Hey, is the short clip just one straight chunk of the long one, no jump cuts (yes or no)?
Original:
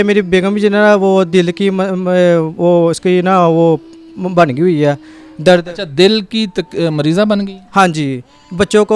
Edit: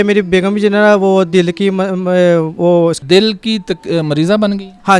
no